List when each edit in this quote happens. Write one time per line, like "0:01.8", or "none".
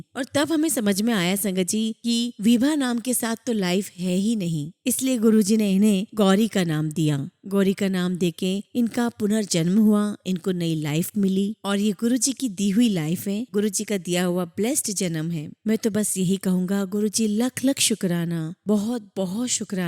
none